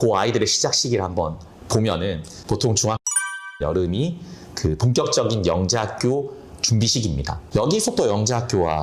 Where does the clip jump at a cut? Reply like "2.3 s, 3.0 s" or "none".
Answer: 2.3 s, 7.3 s